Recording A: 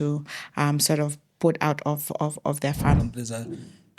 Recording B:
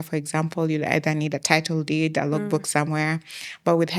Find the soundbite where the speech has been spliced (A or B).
A